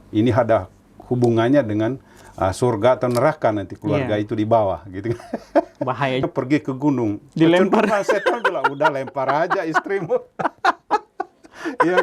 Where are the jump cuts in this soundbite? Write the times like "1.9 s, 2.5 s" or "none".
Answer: 6.2 s